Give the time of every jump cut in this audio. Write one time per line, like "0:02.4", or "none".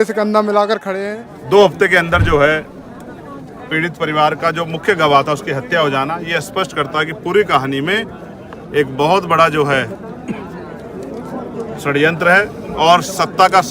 0:00.9